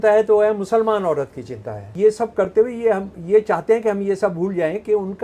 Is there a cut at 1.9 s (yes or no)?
yes